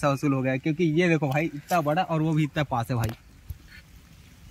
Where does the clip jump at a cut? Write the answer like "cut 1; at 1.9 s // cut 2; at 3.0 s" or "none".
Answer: none